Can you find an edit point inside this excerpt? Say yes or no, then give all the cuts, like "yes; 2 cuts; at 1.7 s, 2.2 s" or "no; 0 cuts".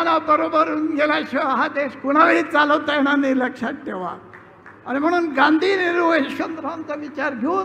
no; 0 cuts